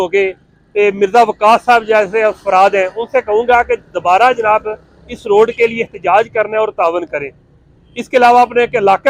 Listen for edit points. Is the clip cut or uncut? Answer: uncut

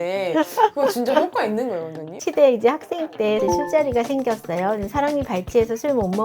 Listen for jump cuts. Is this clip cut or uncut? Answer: cut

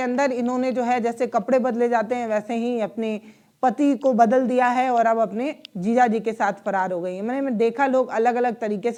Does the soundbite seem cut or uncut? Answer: uncut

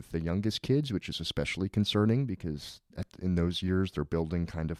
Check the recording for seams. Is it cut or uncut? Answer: uncut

